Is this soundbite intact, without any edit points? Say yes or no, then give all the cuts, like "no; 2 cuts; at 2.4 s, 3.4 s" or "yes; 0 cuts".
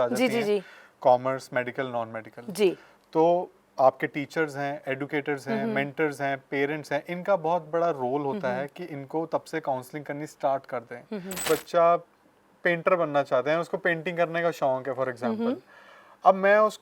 no; 1 cut; at 11.4 s